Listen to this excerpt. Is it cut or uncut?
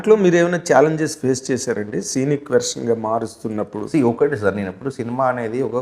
cut